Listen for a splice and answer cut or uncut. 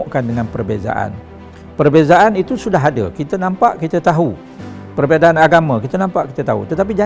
uncut